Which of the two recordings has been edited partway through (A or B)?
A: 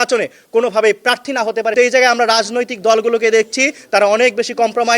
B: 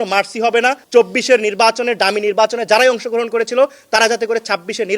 A